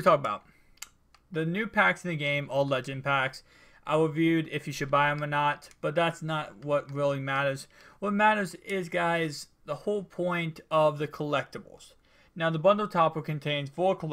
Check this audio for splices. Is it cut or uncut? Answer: uncut